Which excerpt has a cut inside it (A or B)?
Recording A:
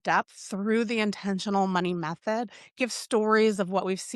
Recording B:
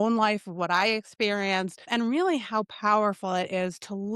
B